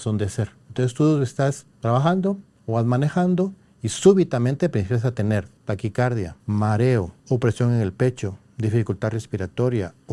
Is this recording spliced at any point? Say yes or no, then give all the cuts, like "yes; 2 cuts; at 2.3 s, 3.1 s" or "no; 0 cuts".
yes; 5 cuts; at 1.7 s, 2.5 s, 5.5 s, 6.4 s, 7.2 s